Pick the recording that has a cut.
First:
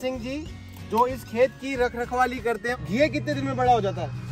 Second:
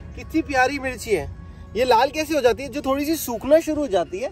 first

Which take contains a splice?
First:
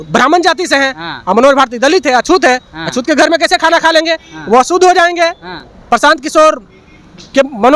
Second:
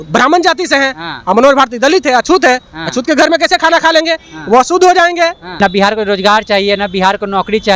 second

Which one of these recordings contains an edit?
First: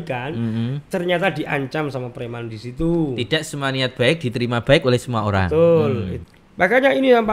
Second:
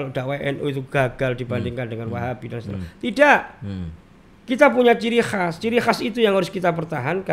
first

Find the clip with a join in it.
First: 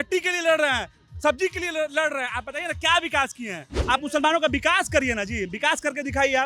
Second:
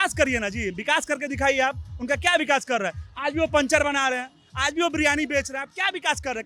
first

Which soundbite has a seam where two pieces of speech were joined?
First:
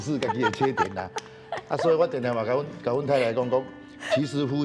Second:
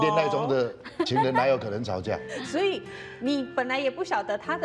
second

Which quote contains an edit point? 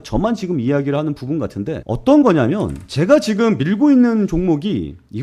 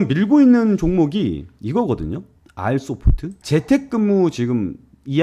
second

